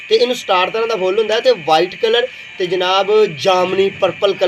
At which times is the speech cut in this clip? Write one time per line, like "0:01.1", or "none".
none